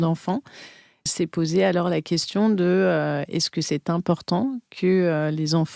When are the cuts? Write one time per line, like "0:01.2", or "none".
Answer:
0:01.1